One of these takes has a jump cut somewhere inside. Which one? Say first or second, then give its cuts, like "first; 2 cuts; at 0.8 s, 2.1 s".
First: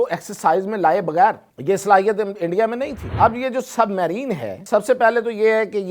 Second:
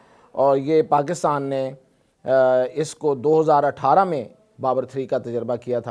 first; 3 cuts; at 1.5 s, 3.1 s, 4.5 s